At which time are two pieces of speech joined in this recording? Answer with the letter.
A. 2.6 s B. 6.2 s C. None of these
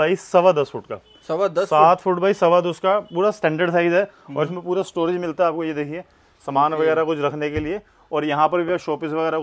C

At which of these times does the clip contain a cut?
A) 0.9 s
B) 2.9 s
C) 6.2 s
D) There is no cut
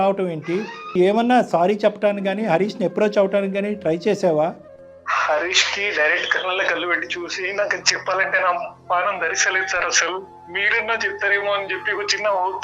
A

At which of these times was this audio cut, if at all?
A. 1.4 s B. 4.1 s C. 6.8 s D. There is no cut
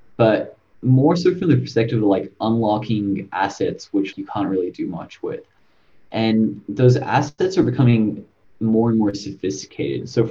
B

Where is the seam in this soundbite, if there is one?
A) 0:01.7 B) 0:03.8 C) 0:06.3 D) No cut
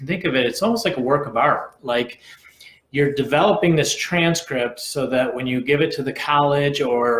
D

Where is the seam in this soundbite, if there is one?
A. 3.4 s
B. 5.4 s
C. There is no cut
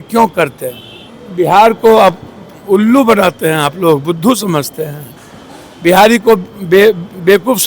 C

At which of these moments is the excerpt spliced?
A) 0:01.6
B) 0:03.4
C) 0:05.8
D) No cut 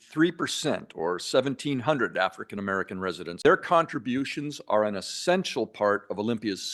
B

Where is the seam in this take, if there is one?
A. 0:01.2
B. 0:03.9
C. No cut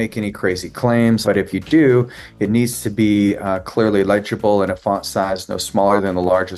A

